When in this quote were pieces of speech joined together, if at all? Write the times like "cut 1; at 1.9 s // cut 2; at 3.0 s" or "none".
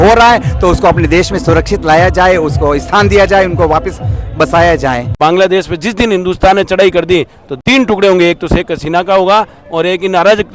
cut 1; at 5.2 s // cut 2; at 7.4 s